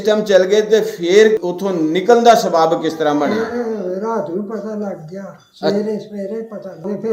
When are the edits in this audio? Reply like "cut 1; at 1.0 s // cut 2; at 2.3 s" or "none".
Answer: cut 1; at 1.4 s